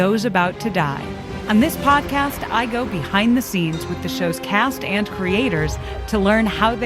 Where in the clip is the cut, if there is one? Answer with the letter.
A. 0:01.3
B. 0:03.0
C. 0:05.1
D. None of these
A